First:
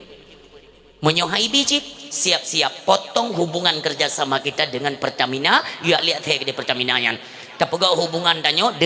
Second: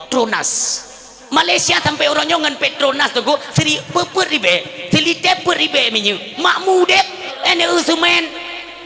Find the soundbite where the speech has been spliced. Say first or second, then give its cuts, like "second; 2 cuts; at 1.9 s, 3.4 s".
second; 1 cut; at 7.3 s